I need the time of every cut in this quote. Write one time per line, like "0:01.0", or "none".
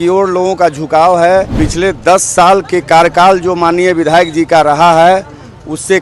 0:01.5

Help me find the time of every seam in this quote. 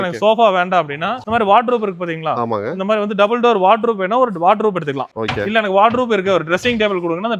0:01.1
0:05.0

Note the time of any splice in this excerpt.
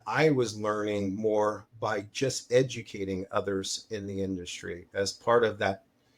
none

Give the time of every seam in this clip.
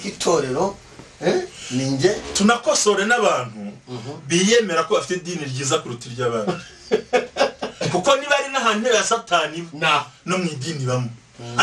0:04.9

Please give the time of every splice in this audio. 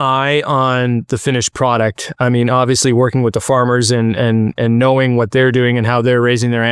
none

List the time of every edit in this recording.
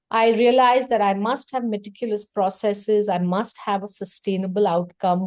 none

